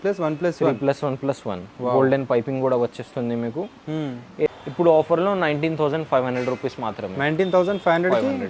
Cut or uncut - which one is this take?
cut